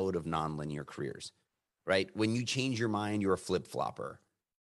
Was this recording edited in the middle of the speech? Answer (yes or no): no